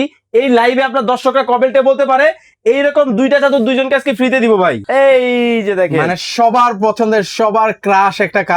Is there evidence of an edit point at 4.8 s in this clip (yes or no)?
yes